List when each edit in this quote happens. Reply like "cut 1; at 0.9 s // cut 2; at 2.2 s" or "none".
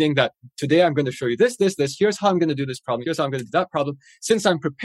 cut 1; at 3.0 s